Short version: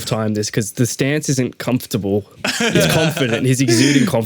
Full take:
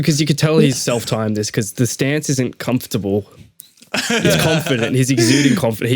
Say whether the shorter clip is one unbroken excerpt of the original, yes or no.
no